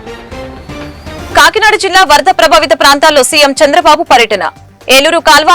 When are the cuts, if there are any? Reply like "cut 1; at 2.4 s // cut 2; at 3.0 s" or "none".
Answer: cut 1; at 1.2 s

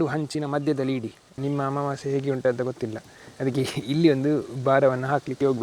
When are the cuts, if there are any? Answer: cut 1; at 1.2 s

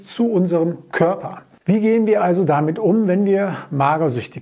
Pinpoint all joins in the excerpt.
cut 1; at 1.5 s

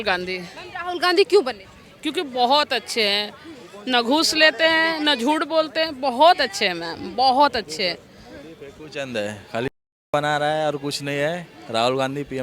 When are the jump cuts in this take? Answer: none

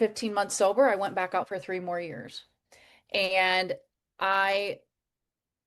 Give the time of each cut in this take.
none

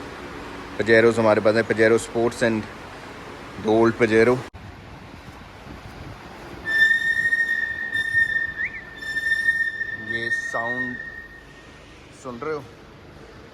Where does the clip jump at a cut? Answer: cut 1; at 4.5 s

